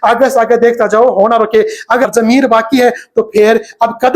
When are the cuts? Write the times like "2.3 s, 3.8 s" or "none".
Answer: 2.1 s